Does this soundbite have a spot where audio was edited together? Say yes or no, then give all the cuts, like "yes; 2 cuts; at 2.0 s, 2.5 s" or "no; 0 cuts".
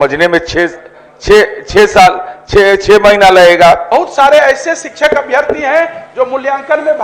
yes; 1 cut; at 3.9 s